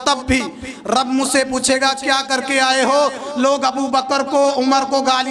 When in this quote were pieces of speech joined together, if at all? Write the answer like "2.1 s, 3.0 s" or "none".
none